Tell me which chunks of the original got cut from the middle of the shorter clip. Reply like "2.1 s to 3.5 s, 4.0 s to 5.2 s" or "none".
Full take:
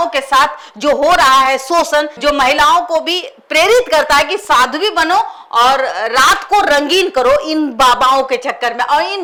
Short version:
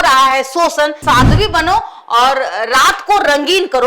2.1 s to 4.4 s